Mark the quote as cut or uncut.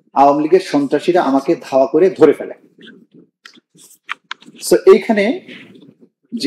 uncut